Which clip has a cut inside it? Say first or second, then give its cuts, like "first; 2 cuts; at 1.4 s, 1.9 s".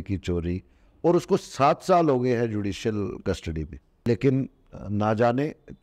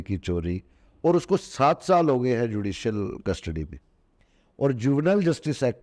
first; 1 cut; at 4.1 s